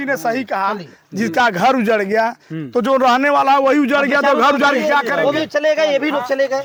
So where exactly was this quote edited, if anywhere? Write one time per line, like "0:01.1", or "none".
none